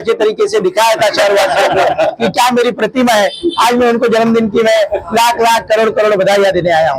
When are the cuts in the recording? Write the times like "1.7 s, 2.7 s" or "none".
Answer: none